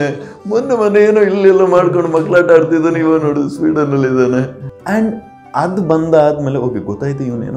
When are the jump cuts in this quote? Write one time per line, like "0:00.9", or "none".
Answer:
none